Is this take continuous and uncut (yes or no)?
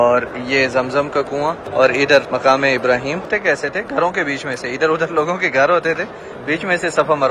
no